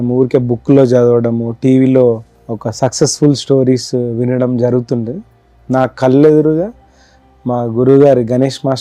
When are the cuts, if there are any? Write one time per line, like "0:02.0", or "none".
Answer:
none